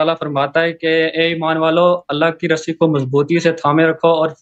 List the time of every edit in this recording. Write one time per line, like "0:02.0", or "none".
none